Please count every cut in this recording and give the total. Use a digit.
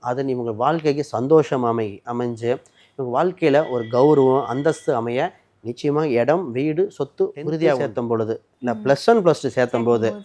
1